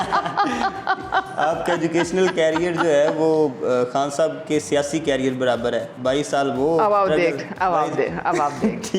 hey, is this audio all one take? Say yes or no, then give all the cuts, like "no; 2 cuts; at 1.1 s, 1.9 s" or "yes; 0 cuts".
yes; 0 cuts